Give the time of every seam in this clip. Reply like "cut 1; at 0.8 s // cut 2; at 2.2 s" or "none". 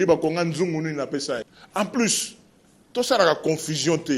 cut 1; at 1.4 s